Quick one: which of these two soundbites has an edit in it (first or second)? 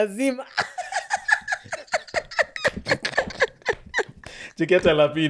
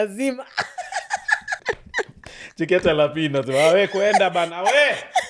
second